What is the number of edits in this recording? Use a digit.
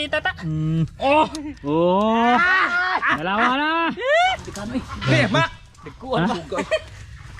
1